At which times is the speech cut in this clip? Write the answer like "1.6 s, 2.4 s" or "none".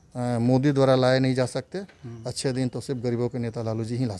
none